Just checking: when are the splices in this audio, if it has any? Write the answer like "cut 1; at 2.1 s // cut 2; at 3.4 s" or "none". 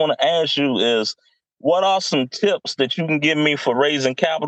none